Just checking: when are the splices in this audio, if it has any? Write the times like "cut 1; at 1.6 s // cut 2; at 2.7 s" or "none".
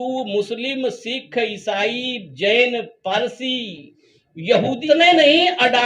cut 1; at 4.8 s